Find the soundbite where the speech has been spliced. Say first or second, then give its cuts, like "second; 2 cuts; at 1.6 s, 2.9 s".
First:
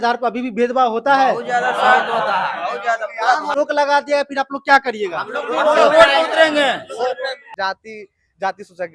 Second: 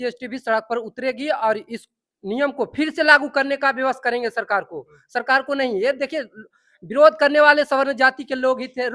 first; 2 cuts; at 3.5 s, 7.5 s